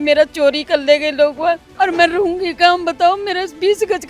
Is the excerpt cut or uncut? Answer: cut